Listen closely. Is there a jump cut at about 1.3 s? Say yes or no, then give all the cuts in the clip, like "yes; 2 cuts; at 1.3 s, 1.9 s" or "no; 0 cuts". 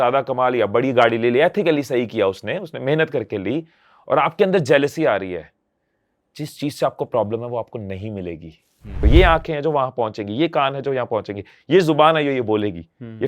no; 1 cut; at 9.1 s